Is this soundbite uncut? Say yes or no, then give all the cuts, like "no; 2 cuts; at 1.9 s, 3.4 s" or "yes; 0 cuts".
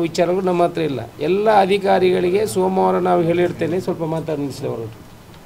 yes; 0 cuts